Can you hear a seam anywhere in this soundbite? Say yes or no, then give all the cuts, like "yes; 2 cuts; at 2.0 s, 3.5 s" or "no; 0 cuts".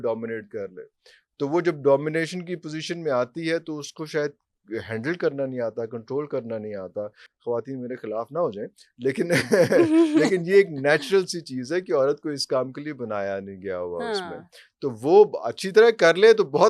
no; 0 cuts